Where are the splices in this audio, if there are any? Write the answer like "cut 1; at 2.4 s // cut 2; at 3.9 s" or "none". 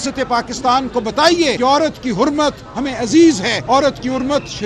cut 1; at 1.6 s // cut 2; at 3.5 s